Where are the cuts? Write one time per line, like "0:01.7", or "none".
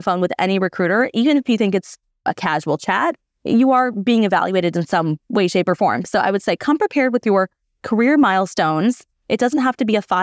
0:02.2